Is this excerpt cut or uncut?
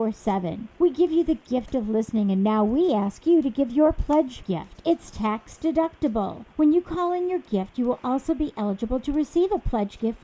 uncut